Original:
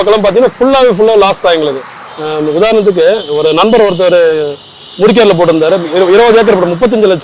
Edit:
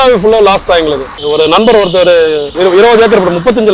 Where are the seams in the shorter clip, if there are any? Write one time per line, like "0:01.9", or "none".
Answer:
0:01.2
0:02.5